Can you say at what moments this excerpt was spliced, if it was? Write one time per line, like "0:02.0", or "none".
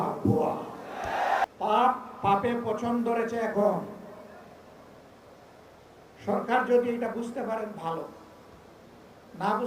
0:01.5